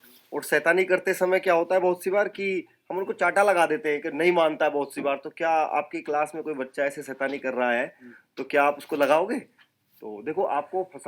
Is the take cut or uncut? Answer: uncut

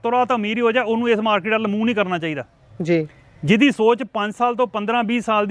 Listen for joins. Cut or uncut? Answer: uncut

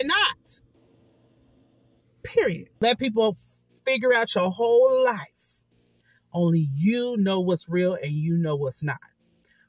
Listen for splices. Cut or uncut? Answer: cut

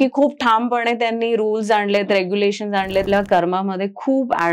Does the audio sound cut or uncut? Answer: cut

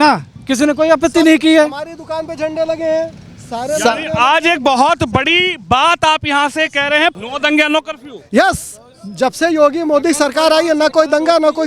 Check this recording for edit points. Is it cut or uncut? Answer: cut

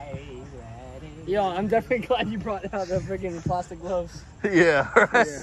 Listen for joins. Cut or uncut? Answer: uncut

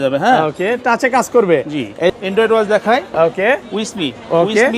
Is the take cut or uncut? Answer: cut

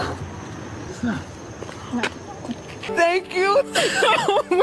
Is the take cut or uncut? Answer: cut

